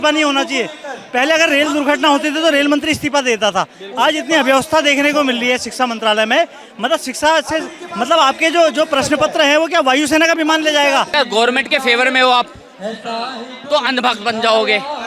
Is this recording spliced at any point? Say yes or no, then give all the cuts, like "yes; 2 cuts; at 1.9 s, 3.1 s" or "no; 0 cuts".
yes; 1 cut; at 11.1 s